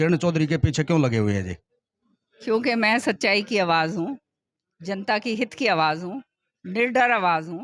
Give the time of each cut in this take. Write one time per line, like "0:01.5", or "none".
none